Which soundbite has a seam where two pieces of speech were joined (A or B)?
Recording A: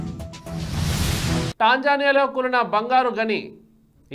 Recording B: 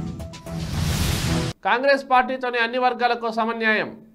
A